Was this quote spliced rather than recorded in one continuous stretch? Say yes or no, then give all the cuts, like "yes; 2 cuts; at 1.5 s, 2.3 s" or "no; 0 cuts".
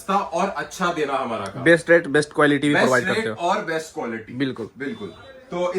no; 0 cuts